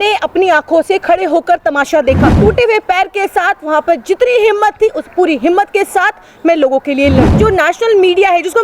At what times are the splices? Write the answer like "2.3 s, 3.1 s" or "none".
2.3 s, 7.3 s

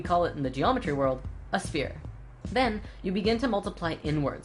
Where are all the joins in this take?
1.3 s

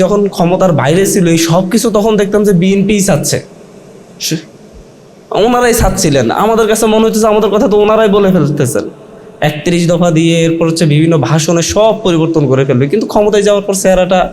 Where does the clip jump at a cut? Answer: none

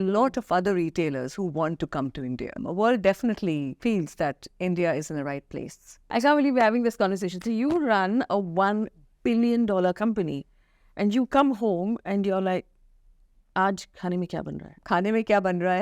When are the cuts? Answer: 2.6 s, 3.8 s, 6.1 s, 14.7 s

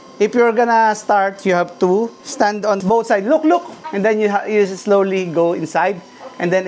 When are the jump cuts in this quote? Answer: 2.7 s, 3.8 s

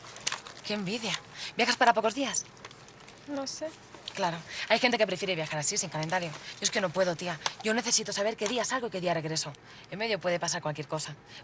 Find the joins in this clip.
none

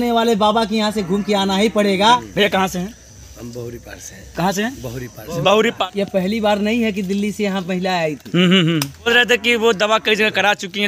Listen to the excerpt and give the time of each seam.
2.0 s, 5.8 s, 9.1 s

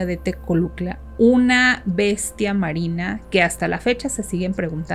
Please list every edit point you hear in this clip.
3.2 s

